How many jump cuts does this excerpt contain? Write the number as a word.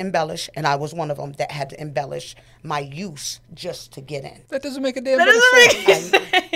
two